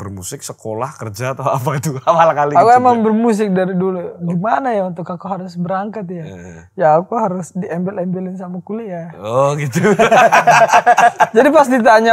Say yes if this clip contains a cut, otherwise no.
yes